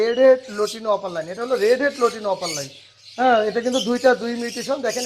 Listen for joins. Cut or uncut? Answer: uncut